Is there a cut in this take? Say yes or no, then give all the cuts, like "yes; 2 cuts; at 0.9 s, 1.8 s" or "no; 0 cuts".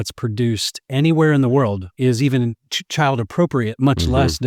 no; 0 cuts